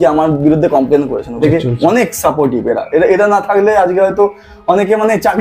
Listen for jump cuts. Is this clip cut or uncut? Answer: cut